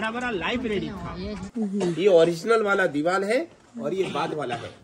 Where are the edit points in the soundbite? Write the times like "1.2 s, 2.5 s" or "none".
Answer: 1.4 s